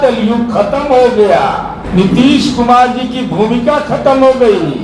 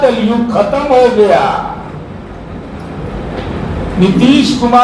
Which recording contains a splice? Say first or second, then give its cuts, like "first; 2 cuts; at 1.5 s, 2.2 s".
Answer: first; 1 cut; at 1.8 s